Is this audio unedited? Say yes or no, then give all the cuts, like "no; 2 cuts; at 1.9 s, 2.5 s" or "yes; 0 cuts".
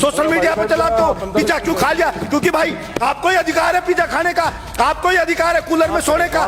yes; 0 cuts